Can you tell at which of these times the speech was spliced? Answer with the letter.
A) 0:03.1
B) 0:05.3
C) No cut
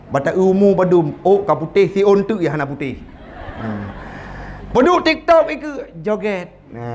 C